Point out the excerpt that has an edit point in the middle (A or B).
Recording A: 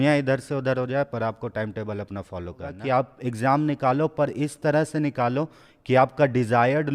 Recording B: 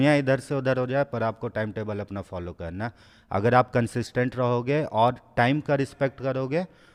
A